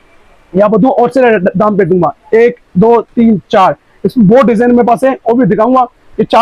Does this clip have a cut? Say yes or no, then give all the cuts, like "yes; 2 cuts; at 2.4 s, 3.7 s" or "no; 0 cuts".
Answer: no; 0 cuts